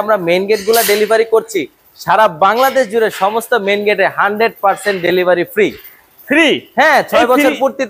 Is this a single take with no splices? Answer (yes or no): yes